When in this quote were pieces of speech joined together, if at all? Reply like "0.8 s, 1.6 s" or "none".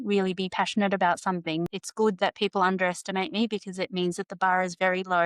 1.8 s